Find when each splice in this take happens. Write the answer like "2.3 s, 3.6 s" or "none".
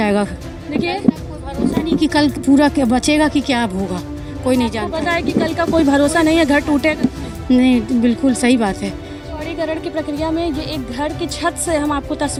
none